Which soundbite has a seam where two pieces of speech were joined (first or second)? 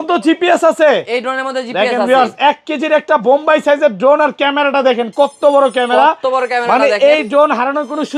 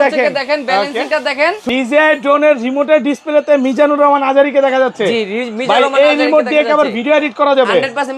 second